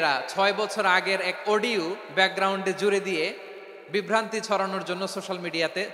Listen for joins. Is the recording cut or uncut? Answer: uncut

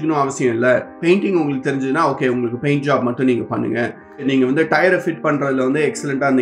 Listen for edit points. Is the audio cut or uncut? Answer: uncut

